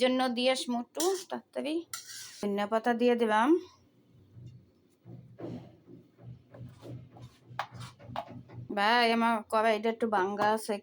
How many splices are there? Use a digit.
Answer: 2